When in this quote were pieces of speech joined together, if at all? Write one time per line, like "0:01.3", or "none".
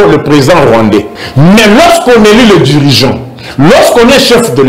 0:01.2

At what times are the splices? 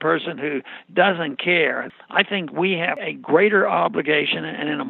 0:01.8
0:03.0

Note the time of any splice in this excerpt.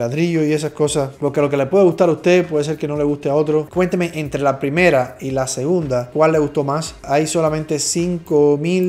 0:03.7
0:07.0

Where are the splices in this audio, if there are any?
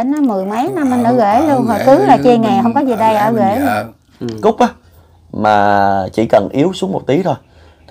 0:04.4

